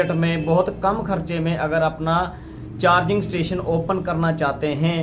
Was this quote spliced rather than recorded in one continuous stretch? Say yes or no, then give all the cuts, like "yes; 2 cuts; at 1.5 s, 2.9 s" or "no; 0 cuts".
no; 0 cuts